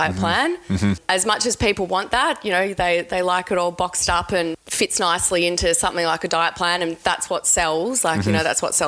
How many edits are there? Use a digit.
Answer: 2